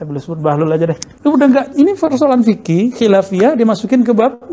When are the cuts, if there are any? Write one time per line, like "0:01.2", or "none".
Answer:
0:01.1